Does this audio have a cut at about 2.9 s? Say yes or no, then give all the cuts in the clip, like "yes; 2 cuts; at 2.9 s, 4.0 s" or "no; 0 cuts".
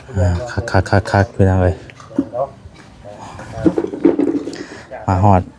no; 0 cuts